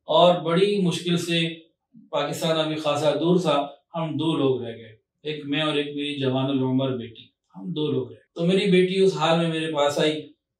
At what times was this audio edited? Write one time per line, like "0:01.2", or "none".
0:08.2